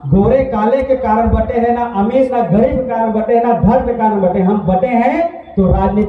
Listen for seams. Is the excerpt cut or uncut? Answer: uncut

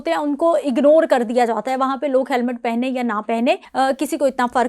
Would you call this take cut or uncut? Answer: cut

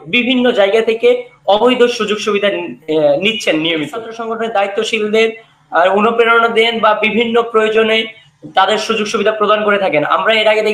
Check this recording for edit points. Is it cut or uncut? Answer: cut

